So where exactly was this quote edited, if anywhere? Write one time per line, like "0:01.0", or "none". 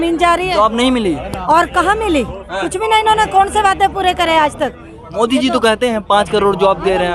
none